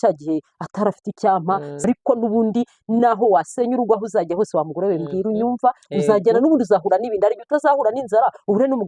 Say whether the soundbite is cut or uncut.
cut